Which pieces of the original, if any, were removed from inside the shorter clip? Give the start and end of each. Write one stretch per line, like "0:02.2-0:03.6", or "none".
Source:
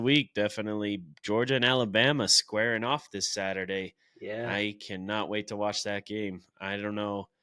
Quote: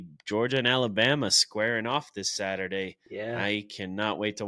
0:04.0-0:04.1